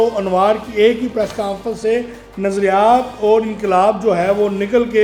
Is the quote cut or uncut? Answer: uncut